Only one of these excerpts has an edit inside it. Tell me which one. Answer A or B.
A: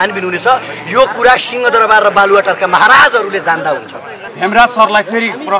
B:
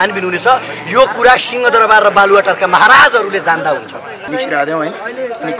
B